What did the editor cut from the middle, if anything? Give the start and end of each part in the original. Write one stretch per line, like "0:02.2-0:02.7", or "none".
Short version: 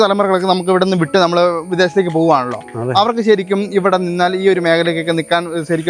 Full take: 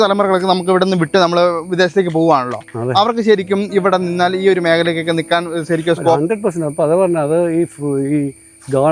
none